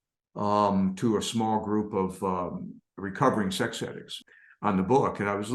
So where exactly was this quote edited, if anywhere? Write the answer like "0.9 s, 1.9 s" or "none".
4.2 s